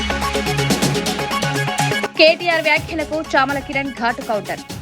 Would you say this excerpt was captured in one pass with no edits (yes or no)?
no